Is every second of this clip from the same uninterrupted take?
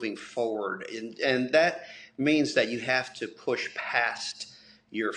yes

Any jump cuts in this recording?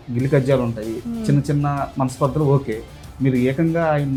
no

